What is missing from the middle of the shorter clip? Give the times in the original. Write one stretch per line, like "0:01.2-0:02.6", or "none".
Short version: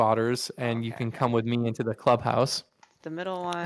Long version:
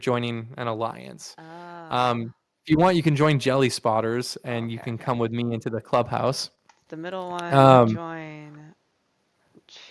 none